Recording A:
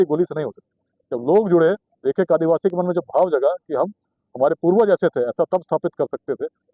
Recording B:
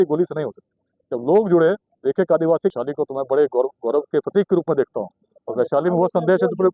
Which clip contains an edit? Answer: B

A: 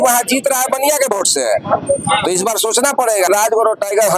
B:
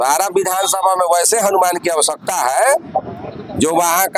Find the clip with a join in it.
A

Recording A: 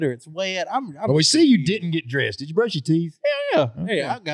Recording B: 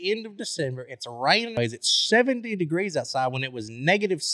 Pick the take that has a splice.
B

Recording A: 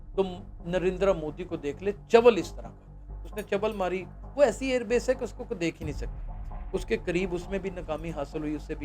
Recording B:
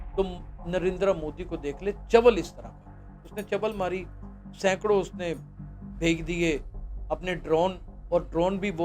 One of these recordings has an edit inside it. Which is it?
A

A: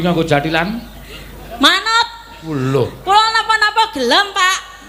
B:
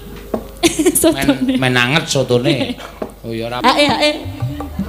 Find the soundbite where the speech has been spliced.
B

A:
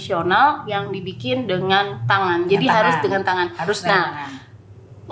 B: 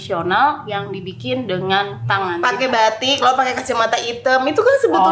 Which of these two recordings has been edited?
B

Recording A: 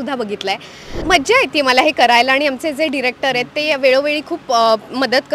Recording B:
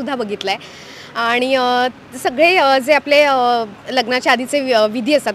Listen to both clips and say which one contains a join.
A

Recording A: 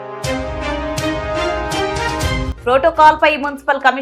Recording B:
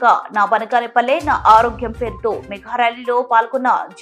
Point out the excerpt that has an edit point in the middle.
A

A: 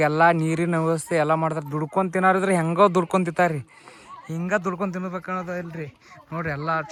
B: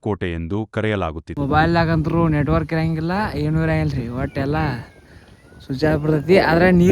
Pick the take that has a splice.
B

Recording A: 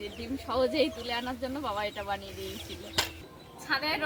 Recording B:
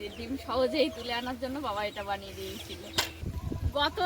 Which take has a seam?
B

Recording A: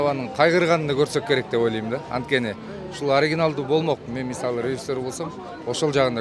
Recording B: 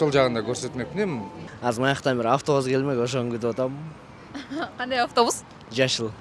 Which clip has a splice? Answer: B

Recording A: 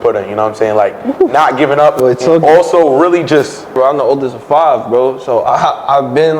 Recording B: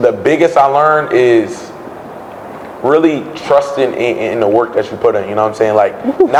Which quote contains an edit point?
A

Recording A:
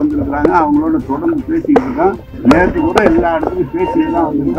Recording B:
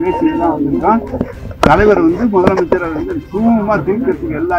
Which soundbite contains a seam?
A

